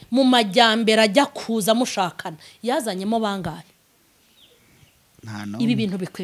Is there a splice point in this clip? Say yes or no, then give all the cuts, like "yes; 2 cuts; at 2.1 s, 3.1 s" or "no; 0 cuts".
no; 0 cuts